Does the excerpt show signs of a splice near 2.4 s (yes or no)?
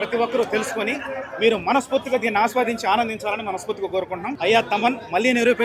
no